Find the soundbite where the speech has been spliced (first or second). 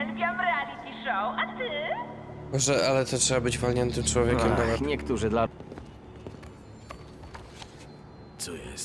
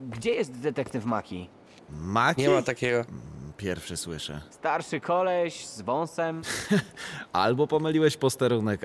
first